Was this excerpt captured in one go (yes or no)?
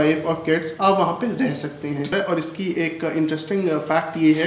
no